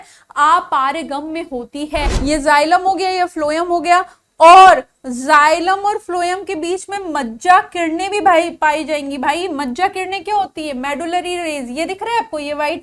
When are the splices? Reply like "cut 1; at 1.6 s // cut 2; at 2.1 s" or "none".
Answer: cut 1; at 2.1 s